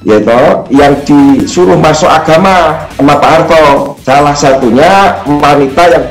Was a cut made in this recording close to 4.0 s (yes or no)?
yes